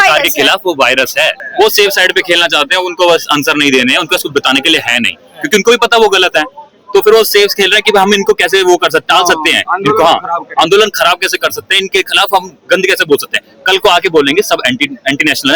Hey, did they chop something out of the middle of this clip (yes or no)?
yes